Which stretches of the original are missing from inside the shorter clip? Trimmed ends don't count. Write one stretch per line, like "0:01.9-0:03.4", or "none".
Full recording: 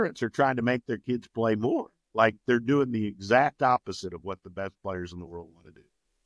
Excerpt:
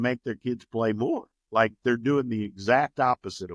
none